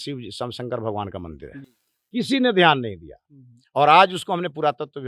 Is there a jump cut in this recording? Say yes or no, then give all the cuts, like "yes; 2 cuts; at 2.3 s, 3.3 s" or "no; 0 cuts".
no; 0 cuts